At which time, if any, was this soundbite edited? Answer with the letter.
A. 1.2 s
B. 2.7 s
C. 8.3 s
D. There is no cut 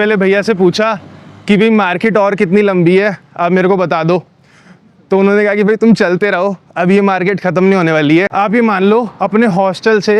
C